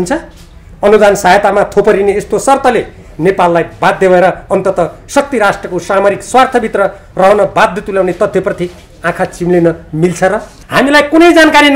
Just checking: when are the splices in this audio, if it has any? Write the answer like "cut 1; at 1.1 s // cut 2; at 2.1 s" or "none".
cut 1; at 10.5 s

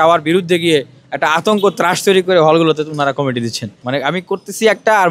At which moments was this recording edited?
cut 1; at 3.8 s

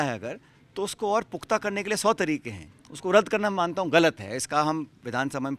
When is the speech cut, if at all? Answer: none

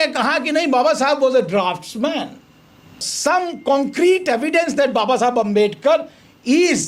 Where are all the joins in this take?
cut 1; at 3.1 s

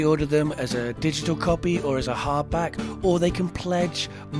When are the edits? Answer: none

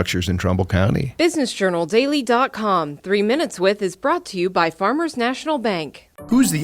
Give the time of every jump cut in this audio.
cut 1; at 1.1 s

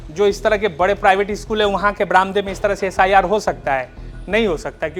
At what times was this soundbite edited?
none

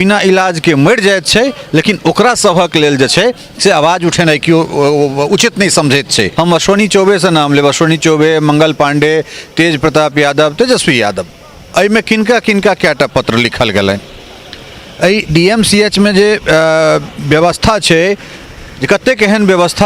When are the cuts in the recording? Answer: cut 1; at 6.3 s

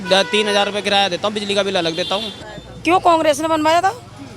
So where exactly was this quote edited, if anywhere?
cut 1; at 2.4 s

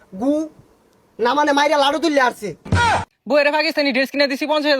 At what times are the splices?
cut 1; at 2.8 s

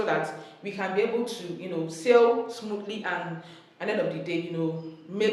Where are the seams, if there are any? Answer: none

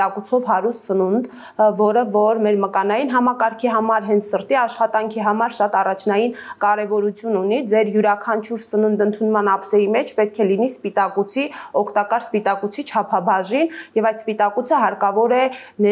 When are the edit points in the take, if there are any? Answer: none

